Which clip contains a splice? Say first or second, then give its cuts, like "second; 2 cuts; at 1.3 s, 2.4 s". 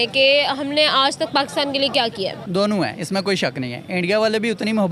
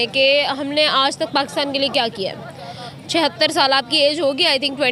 first; 1 cut; at 2.4 s